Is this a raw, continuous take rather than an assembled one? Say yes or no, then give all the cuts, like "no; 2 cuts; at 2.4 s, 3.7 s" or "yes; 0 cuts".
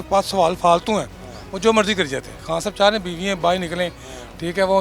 no; 1 cut; at 2.4 s